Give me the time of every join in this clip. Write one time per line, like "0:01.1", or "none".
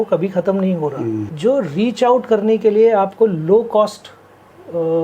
0:01.3